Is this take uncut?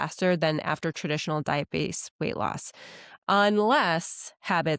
yes; 0 cuts

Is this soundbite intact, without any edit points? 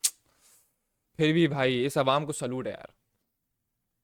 yes; 0 cuts

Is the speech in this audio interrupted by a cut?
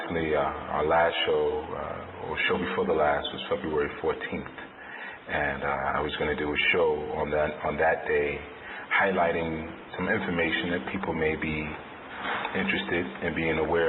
no; 0 cuts

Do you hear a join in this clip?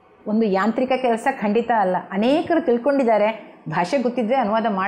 no; 0 cuts

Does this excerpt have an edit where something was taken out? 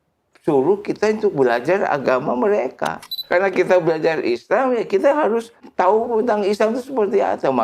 yes; 1 cut; at 3.1 s

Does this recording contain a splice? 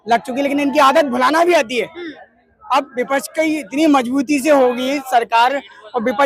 no; 0 cuts

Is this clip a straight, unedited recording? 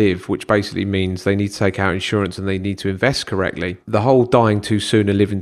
no; 1 cut; at 3.8 s

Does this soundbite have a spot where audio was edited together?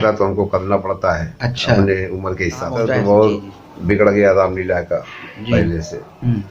yes; 1 cut; at 2.7 s

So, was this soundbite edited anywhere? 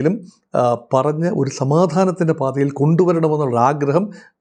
no; 0 cuts

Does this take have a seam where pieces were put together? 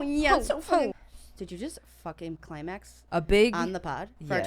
yes; 1 cut; at 0.9 s

